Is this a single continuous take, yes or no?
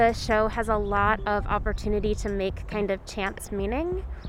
yes